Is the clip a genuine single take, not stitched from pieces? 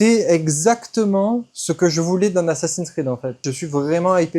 no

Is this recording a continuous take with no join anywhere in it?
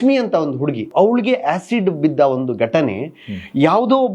no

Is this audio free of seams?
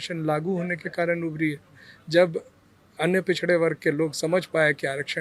yes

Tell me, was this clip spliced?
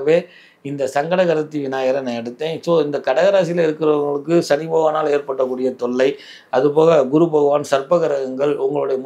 no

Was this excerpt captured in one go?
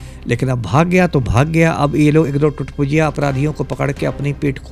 yes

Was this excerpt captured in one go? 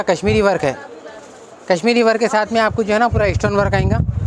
yes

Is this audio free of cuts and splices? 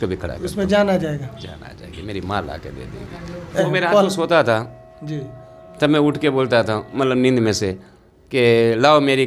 no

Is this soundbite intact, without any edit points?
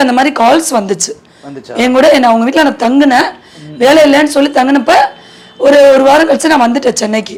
yes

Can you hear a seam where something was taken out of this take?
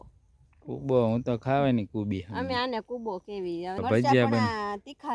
yes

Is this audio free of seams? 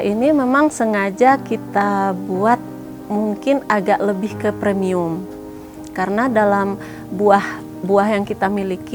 yes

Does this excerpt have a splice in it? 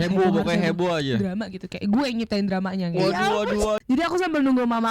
yes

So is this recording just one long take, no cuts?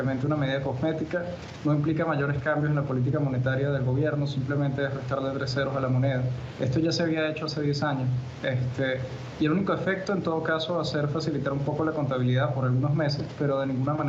yes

